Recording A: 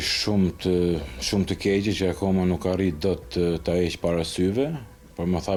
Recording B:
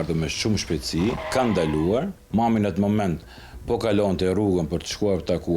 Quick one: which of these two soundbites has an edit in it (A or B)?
B